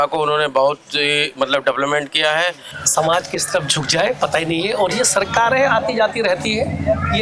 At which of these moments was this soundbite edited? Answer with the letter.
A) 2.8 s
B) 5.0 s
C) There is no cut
A